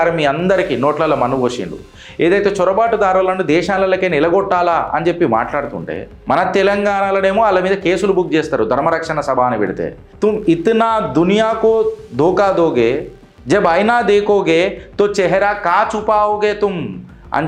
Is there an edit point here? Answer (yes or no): yes